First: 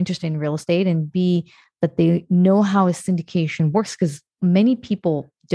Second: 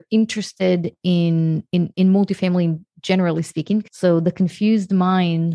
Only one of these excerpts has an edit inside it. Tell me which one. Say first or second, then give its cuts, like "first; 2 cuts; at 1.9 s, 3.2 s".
second; 1 cut; at 3.9 s